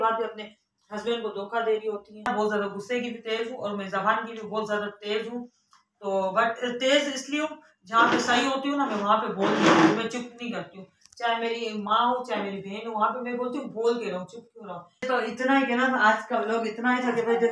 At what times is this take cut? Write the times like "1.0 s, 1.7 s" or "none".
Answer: 2.3 s, 14.9 s